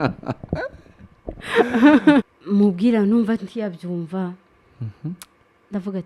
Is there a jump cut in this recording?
yes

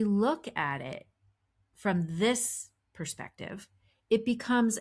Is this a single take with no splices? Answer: yes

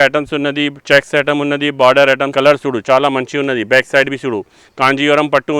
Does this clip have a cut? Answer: yes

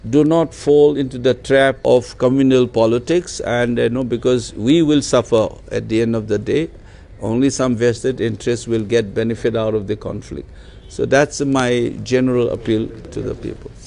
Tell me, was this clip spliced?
no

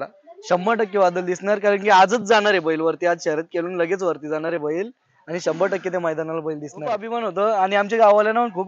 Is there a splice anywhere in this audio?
yes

